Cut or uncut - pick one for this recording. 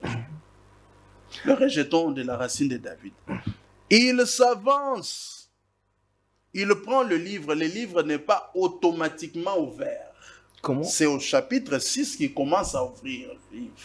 uncut